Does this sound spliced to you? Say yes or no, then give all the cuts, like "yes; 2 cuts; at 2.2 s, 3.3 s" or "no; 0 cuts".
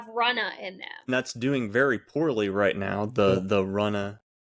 yes; 1 cut; at 1.1 s